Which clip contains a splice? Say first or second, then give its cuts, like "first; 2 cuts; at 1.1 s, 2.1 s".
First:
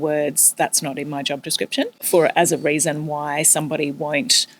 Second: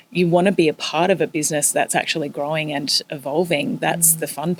first; 1 cut; at 2.0 s